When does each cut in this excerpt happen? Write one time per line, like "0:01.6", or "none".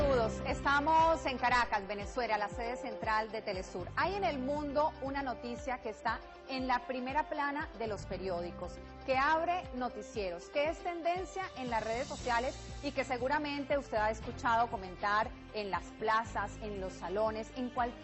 none